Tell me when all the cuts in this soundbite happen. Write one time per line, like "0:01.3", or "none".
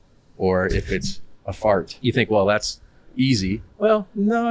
0:01.9

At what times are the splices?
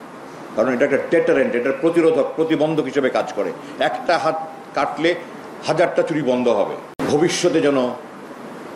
0:06.9

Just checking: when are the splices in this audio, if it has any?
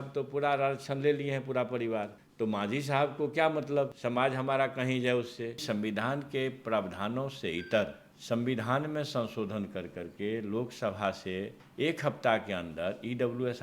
0:02.2
0:04.0
0:05.6
0:08.1
0:11.6

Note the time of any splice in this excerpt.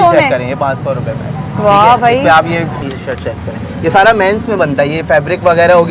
0:02.8

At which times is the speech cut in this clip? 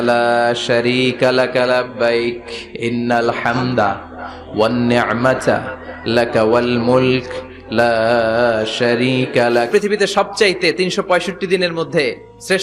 0:09.7

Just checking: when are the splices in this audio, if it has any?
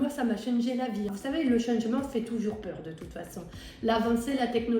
0:01.1

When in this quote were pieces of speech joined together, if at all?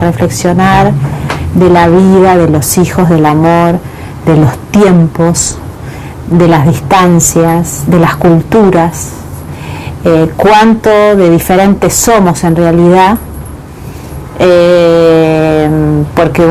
0:01.2

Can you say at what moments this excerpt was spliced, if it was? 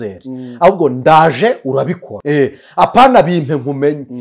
0:02.1

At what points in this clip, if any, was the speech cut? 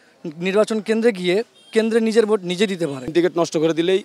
0:03.1

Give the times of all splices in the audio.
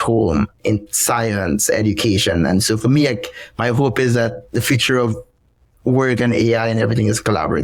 none

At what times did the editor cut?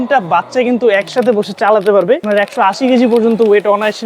0:02.2

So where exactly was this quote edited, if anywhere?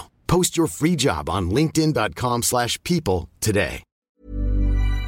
0:03.9

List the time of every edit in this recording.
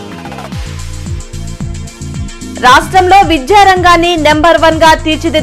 none

